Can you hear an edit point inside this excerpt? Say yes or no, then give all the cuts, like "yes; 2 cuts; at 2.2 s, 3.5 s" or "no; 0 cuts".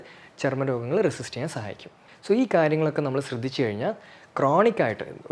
no; 0 cuts